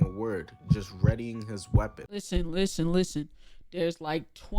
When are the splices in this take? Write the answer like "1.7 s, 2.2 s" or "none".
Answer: 2.2 s